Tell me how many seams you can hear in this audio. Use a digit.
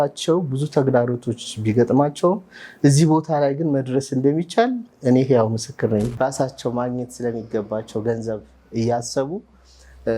1